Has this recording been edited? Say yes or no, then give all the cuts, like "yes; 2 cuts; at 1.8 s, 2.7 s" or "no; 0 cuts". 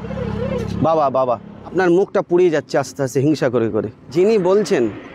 yes; 2 cuts; at 1.6 s, 4.0 s